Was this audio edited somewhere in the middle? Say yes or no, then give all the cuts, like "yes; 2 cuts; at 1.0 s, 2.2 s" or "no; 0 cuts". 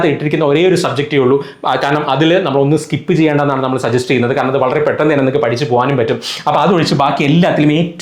no; 0 cuts